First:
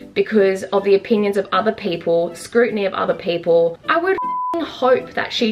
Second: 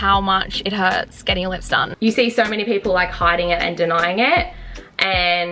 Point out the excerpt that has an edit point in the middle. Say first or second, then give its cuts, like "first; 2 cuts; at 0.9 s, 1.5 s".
second; 1 cut; at 1.9 s